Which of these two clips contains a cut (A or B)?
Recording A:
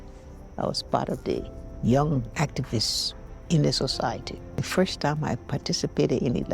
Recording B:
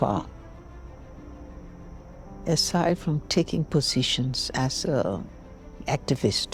A